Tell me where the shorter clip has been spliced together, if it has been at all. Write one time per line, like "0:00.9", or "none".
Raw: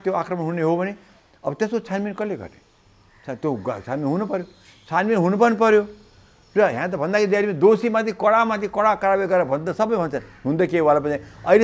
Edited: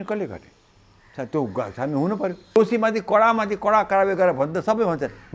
0:02.6